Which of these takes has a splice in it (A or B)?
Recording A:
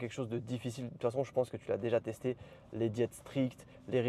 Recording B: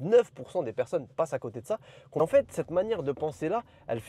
B